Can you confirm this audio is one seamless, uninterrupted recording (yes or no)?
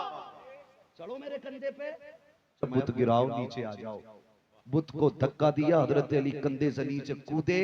no